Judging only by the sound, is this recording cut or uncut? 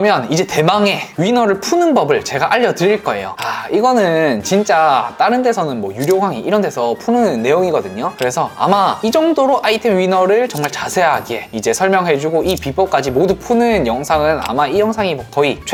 uncut